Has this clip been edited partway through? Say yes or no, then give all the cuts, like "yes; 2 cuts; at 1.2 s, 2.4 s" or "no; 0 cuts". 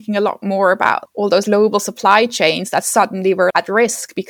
no; 0 cuts